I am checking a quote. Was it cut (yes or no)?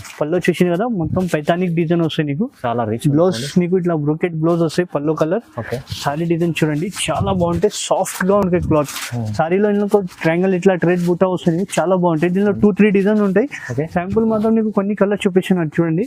no